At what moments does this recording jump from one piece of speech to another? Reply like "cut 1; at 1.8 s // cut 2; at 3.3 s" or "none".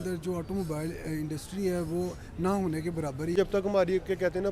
cut 1; at 3.3 s